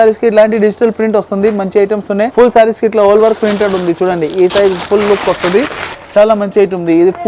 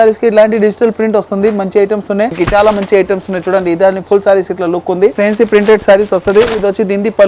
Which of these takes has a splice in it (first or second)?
second